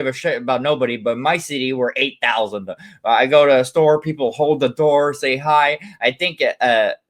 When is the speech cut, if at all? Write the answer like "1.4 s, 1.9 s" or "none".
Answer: none